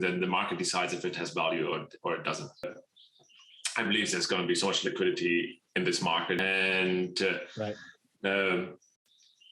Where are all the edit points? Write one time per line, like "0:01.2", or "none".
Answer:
0:02.6
0:06.4